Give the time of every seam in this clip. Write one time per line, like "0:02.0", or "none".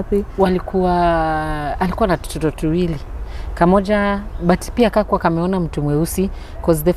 none